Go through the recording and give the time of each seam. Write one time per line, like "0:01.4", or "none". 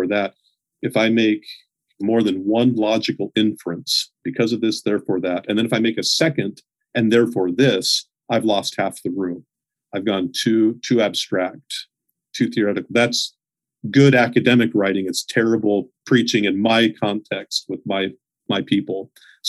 0:01.9